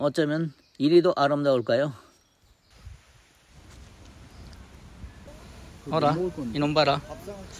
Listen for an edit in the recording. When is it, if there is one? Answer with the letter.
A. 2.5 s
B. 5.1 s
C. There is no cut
C